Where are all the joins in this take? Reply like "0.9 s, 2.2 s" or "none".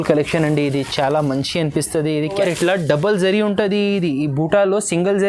2.4 s